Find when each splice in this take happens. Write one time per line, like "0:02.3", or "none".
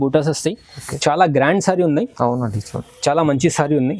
0:01.0